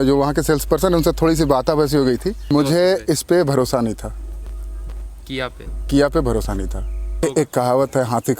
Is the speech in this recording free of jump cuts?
no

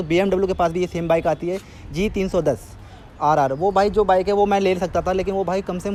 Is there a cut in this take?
no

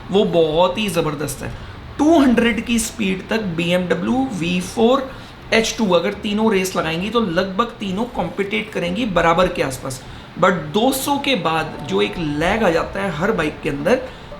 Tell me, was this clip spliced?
no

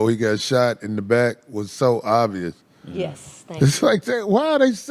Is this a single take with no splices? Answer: yes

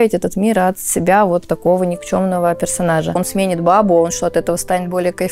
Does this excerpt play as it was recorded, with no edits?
no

